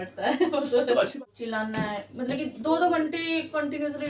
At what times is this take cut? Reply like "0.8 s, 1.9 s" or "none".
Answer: 1.2 s